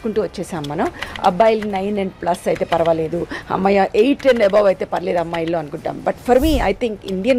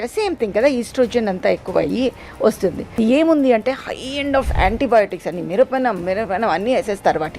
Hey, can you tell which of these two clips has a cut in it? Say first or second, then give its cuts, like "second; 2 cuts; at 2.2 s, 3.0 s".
second; 1 cut; at 3.0 s